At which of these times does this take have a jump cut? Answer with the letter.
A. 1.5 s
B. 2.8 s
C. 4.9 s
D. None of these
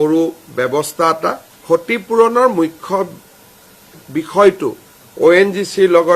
A